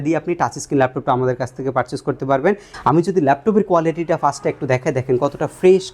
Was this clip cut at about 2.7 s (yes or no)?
yes